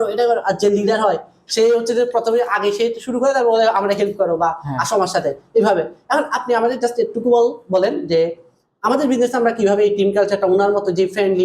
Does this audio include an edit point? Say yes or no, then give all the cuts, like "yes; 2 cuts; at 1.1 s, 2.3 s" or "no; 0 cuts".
no; 0 cuts